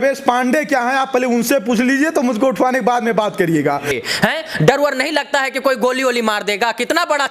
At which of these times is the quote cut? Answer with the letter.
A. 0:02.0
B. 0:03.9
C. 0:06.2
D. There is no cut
B